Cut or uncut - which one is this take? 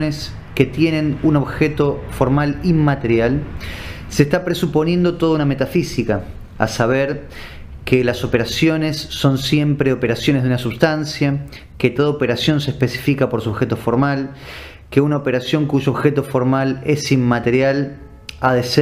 cut